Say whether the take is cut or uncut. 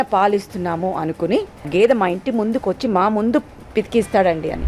cut